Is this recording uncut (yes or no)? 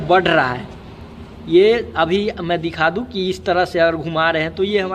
yes